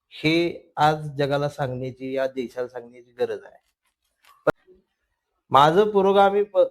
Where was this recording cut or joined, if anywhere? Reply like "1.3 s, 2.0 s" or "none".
4.5 s